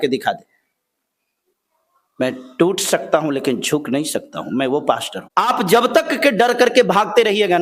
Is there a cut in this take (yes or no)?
yes